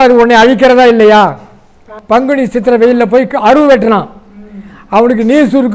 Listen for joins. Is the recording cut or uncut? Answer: cut